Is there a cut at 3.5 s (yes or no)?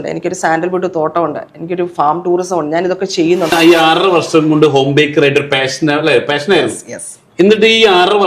yes